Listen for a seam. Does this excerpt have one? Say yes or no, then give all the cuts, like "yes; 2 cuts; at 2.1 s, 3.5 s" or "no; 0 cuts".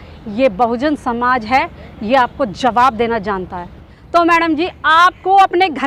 yes; 1 cut; at 3.8 s